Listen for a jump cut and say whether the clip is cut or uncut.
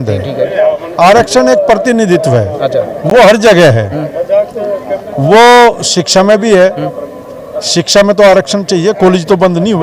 uncut